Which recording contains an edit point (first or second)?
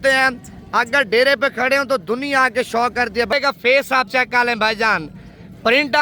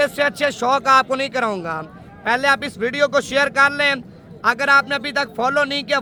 first